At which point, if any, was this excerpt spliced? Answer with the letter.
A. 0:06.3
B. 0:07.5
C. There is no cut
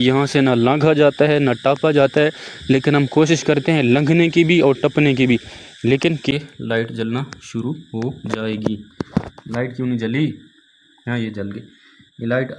A